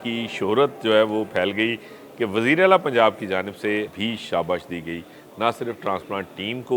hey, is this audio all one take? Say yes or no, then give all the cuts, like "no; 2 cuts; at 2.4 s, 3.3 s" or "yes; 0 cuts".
no; 1 cut; at 3.9 s